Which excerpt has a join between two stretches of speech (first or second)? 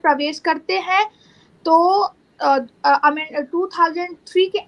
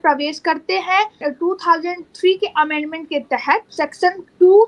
second